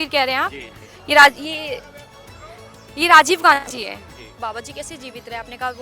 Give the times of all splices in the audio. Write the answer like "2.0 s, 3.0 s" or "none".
4.4 s